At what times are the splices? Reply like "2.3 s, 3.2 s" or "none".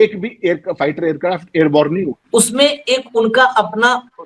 2.2 s

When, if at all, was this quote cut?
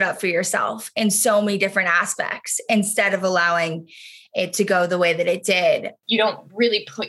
5.9 s

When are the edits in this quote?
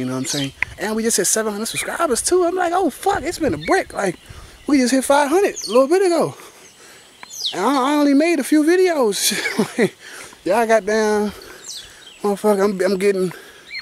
none

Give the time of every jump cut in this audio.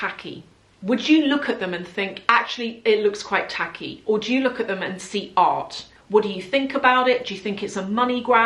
5.9 s

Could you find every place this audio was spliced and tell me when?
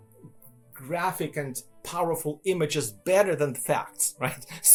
none

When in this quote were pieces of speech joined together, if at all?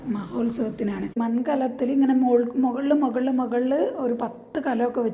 1.2 s

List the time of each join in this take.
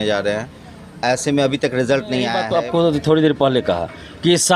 2.4 s

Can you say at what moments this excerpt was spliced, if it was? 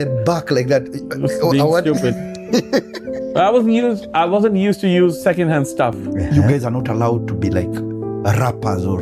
6.3 s

